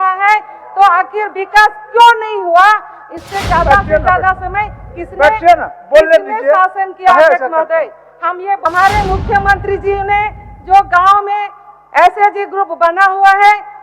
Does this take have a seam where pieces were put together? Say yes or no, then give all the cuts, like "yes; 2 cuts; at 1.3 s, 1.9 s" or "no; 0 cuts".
yes; 1 cut; at 8.6 s